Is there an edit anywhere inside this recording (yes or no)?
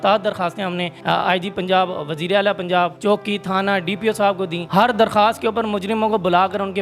yes